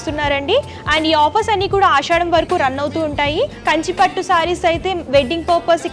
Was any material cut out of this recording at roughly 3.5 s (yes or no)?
yes